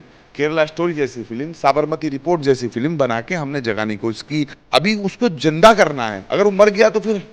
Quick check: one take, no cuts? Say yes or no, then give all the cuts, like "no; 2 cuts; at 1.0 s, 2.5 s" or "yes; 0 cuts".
no; 1 cut; at 4.5 s